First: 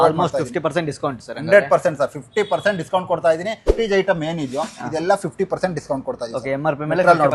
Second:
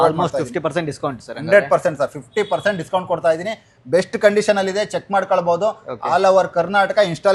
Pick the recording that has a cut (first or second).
first